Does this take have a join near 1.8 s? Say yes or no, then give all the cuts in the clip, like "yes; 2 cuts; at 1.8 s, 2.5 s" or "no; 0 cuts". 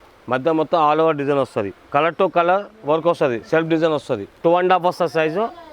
no; 1 cut; at 4.2 s